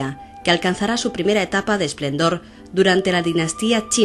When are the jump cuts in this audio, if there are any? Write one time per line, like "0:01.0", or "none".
0:02.5